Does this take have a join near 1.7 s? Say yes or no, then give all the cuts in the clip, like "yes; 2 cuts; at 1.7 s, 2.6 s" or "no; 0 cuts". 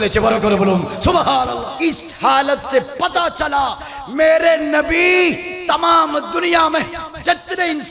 yes; 1 cut; at 1.7 s